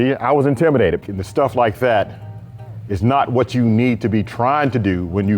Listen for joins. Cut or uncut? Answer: cut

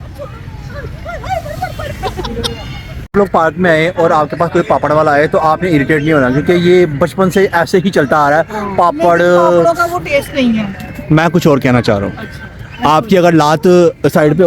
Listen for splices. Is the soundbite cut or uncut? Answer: cut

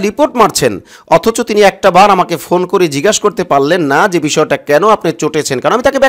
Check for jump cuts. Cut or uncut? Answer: uncut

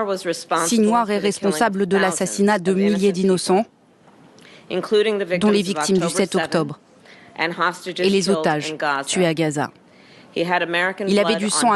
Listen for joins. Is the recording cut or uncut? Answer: uncut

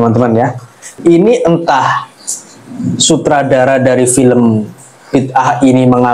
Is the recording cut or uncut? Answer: uncut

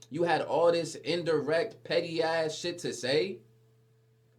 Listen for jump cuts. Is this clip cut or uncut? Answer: uncut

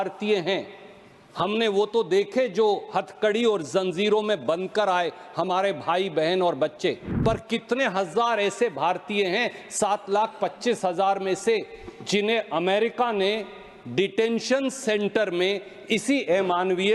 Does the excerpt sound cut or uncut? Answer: cut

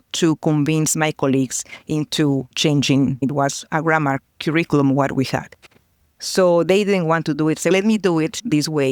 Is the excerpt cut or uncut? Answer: cut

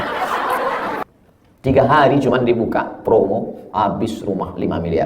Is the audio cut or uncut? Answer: cut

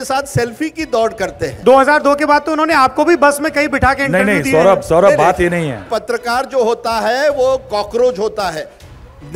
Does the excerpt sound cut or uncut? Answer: cut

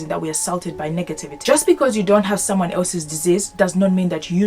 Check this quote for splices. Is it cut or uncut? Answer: cut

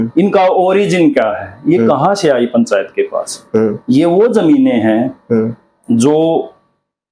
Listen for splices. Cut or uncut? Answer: uncut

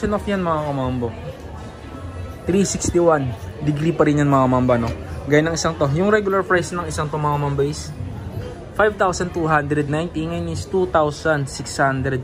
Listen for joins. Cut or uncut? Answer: uncut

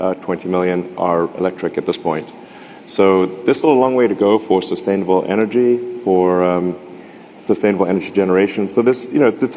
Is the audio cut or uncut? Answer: uncut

